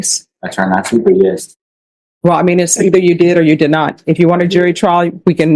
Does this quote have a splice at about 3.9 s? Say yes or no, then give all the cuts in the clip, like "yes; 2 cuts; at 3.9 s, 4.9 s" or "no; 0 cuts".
no; 0 cuts